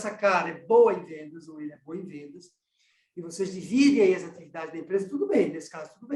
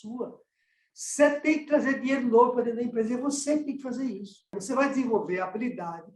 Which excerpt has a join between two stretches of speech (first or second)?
second